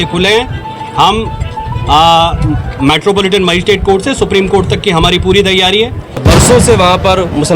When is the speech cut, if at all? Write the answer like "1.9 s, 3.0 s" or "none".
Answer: 6.2 s